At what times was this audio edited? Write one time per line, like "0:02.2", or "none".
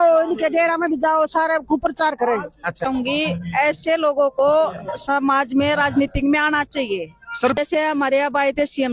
0:02.9
0:07.6